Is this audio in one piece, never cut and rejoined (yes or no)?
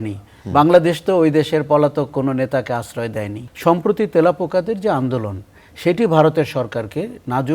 no